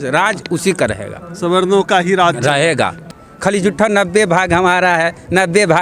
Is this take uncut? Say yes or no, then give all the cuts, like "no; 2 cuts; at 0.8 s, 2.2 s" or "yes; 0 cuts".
no; 1 cut; at 3.0 s